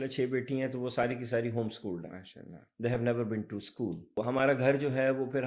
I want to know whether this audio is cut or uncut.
cut